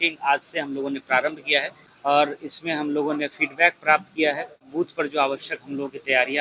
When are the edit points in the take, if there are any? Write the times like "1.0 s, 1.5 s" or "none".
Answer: 1.8 s, 4.7 s